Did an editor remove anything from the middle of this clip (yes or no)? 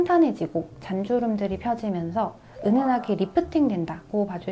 no